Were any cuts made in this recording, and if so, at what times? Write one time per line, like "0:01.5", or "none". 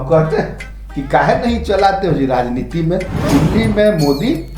0:03.2

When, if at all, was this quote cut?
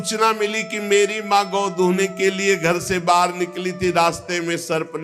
none

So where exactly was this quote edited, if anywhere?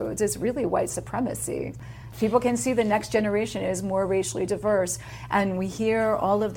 none

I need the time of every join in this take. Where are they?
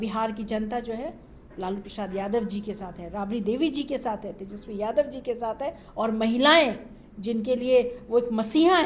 none

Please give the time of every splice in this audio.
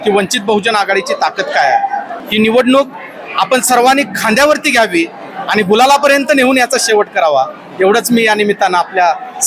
0:02.2

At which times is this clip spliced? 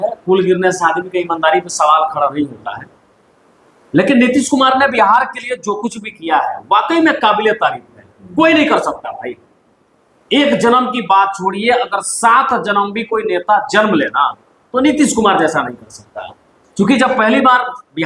none

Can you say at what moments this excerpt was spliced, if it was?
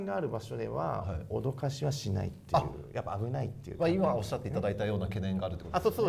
none

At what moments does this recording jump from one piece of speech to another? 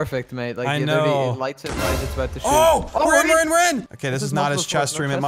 0:03.9

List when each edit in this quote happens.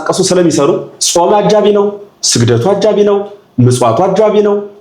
0:00.9

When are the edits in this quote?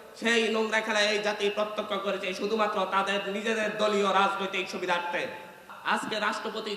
0:05.7

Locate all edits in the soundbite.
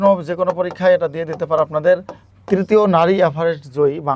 none

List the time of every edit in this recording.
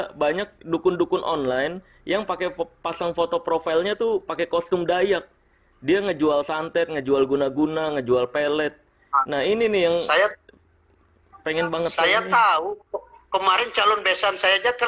none

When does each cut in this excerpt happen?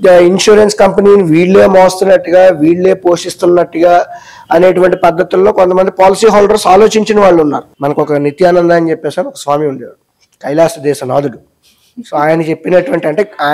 0:07.7

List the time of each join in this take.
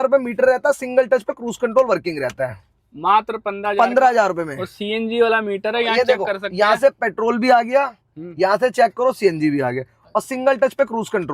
none

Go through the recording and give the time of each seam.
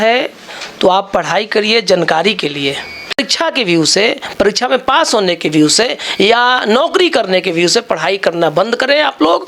0:03.2

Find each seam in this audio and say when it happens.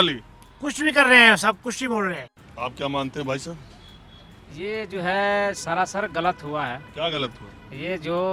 none

